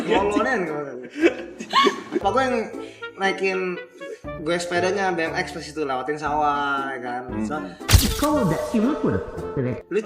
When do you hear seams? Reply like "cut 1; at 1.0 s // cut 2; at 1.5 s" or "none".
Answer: cut 1; at 2.2 s